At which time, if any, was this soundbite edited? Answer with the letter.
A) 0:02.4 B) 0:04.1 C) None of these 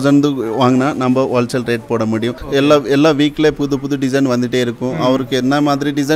A